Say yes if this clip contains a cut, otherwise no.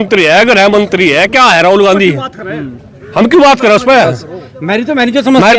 no